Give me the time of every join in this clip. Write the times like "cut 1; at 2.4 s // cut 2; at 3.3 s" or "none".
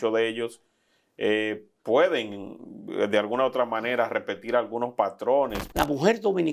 cut 1; at 5.6 s